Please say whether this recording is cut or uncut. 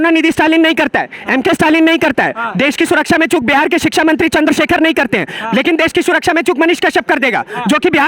uncut